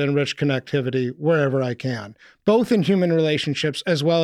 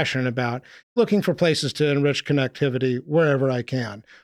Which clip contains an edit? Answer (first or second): second